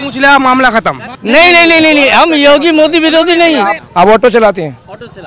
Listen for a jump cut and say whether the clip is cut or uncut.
cut